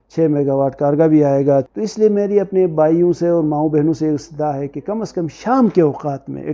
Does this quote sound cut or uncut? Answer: cut